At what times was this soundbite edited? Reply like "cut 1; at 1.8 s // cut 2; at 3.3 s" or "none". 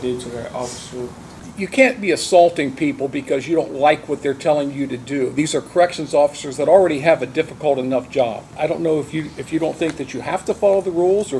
cut 1; at 1.4 s // cut 2; at 8.4 s